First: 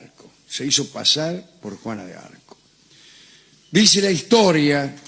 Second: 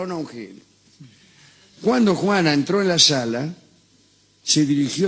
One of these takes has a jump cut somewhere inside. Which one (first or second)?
first